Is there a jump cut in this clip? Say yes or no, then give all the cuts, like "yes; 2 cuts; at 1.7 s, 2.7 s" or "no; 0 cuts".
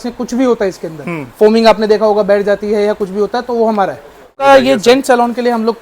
yes; 1 cut; at 4.4 s